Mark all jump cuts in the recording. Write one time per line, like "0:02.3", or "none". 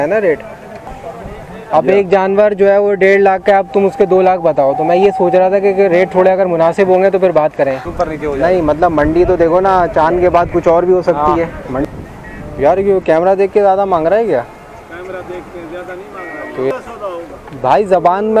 0:01.0
0:07.9
0:11.9
0:16.7